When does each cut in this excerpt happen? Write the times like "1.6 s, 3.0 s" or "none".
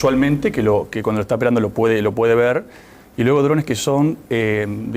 2.8 s